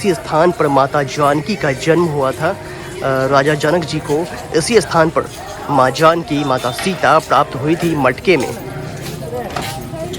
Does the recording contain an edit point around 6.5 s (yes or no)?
no